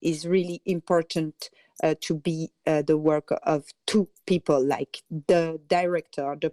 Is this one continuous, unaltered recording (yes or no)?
yes